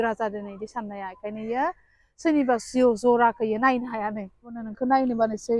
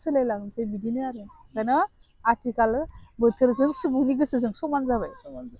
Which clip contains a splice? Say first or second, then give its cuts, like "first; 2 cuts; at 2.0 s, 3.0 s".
first; 1 cut; at 4.7 s